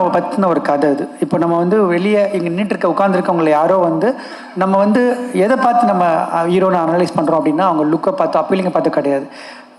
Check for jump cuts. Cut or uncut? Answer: uncut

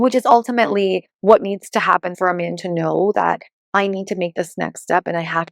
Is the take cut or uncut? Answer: cut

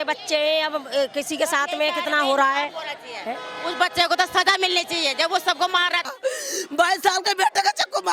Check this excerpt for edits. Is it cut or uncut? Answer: cut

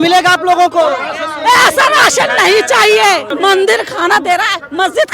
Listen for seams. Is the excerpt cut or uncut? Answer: cut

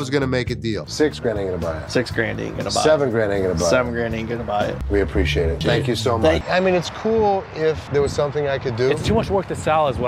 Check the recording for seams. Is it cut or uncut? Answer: uncut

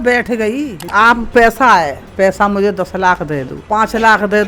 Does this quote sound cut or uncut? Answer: cut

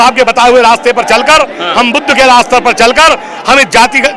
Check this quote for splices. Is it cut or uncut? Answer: uncut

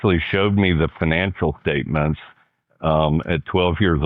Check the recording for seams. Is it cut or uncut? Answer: uncut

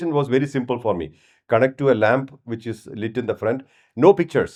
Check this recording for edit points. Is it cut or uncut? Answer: uncut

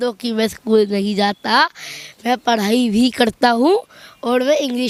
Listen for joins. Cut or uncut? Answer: uncut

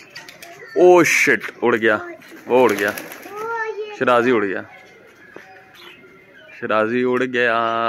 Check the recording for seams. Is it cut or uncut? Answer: uncut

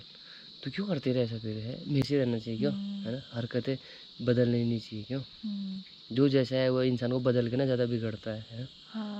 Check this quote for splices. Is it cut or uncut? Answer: cut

